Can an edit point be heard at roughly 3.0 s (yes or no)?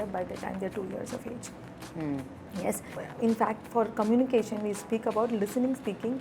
yes